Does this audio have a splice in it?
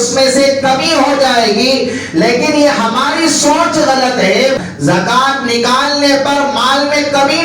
yes; 1 cut; at 4.6 s

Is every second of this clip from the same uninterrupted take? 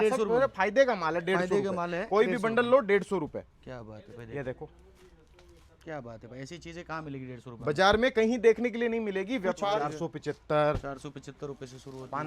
no; 1 cut; at 9.7 s

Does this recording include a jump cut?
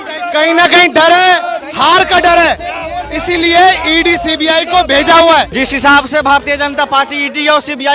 no; 0 cuts

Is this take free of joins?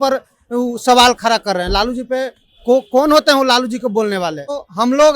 yes; 0 cuts

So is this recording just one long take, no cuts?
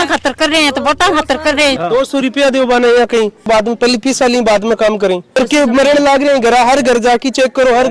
no; 3 cuts; at 1.8 s, 3.5 s, 5.4 s

